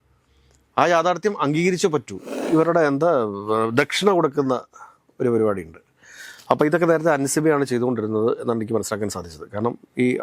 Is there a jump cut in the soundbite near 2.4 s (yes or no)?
yes